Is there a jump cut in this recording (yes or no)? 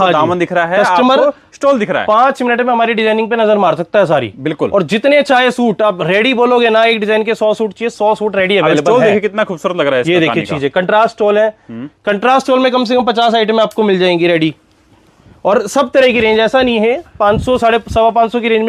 no